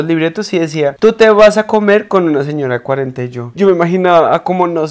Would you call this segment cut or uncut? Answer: uncut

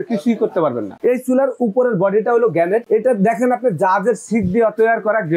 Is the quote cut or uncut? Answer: cut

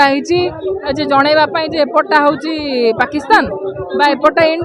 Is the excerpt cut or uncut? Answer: uncut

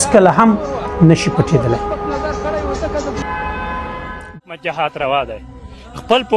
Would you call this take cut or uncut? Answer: cut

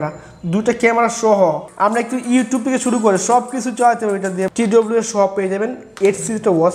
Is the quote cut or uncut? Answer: cut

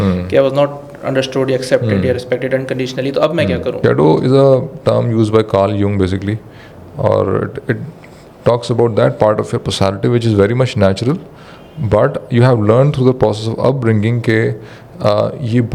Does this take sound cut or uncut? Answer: cut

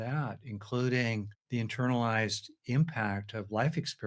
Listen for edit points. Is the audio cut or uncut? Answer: cut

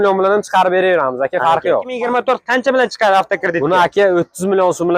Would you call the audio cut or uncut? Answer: cut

